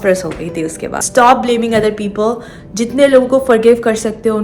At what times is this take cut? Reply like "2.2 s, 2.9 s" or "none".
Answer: 1.0 s